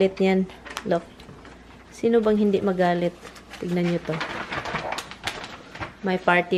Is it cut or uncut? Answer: uncut